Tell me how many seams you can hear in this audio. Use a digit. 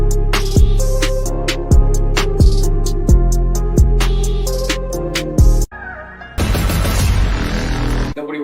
1